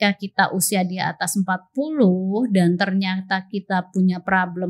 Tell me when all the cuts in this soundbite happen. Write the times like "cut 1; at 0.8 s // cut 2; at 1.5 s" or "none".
none

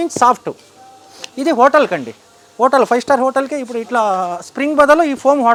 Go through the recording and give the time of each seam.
none

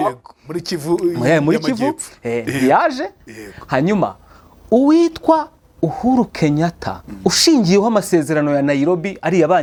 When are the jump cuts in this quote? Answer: none

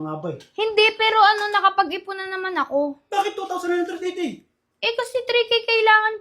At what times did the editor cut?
cut 1; at 3.0 s

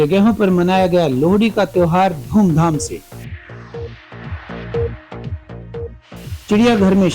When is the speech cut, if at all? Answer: cut 1; at 3.1 s

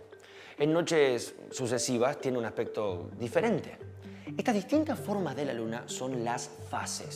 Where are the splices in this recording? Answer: none

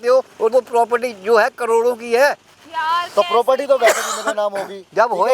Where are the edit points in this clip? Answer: none

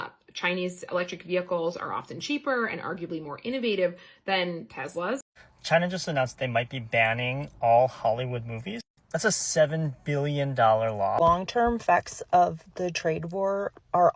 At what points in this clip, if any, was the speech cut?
cut 1; at 5.3 s // cut 2; at 11.2 s

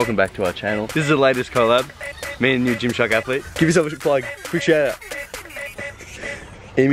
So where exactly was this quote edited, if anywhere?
cut 1; at 0.9 s // cut 2; at 3.5 s

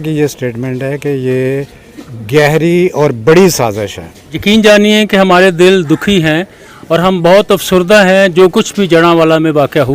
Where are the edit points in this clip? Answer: cut 1; at 4.3 s

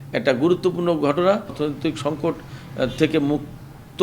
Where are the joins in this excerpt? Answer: cut 1; at 1.5 s

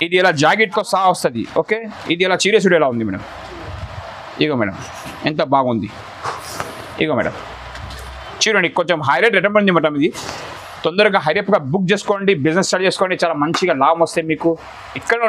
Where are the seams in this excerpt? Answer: none

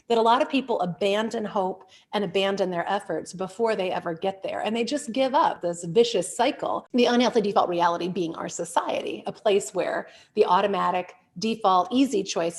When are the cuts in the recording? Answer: cut 1; at 5.7 s // cut 2; at 6.8 s

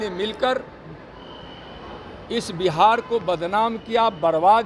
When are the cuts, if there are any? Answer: none

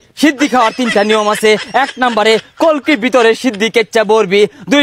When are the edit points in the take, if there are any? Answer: none

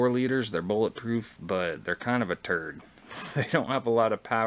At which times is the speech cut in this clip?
none

